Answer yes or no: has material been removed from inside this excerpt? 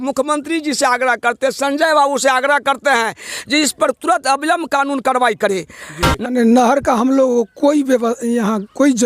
yes